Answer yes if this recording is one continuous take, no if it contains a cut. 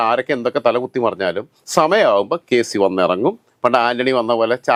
yes